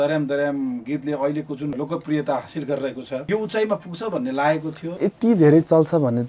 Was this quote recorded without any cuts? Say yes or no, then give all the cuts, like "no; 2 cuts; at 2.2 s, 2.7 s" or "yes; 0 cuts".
no; 3 cuts; at 1.7 s, 3.2 s, 5.0 s